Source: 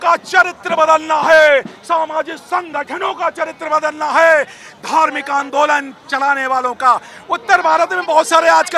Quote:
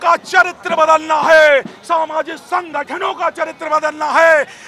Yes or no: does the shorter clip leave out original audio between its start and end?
no